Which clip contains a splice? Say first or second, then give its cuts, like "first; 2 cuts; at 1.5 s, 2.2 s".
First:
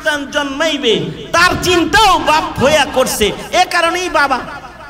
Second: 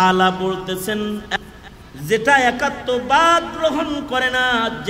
second; 1 cut; at 1.4 s